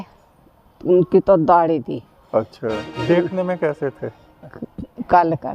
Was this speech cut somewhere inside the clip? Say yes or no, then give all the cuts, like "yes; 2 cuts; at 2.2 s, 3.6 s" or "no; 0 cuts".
yes; 1 cut; at 2.8 s